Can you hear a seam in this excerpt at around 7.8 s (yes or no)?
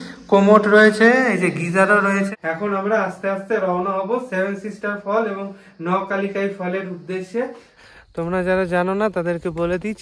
yes